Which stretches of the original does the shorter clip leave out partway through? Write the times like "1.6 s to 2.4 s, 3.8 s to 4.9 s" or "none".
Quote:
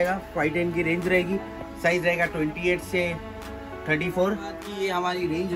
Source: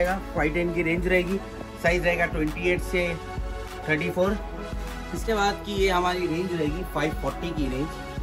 4.6 s to 5.6 s